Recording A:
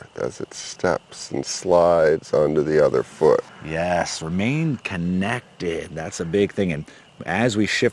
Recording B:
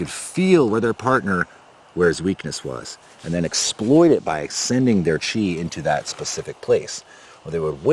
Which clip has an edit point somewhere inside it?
A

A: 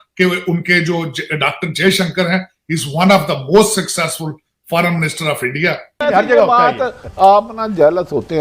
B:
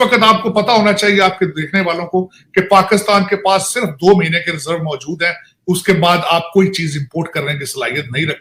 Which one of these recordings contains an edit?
A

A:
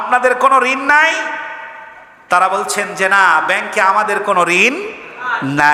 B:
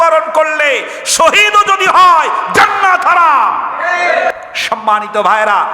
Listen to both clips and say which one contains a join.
B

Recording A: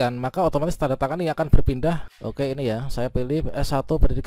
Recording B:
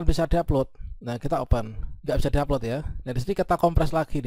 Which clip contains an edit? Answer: A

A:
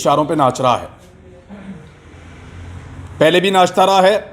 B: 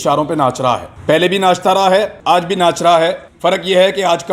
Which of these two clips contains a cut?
B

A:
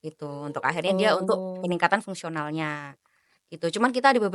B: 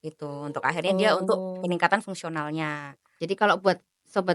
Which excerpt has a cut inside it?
B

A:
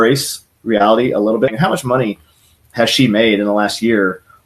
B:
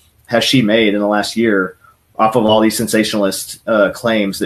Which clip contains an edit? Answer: A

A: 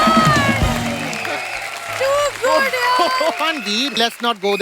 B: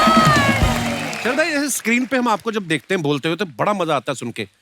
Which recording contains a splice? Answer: B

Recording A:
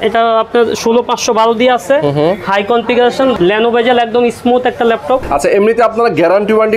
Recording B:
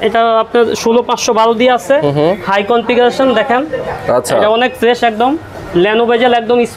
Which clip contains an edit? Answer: A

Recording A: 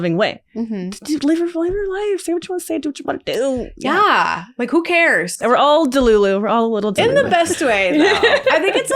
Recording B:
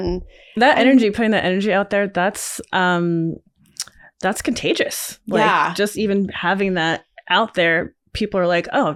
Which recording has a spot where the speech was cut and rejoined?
A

